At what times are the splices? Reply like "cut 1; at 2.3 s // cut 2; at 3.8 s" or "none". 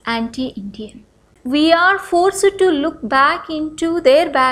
cut 1; at 1.4 s